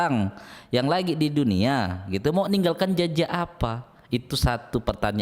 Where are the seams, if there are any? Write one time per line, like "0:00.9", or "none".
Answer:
none